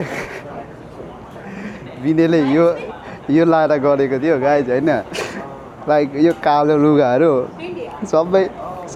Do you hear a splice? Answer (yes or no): no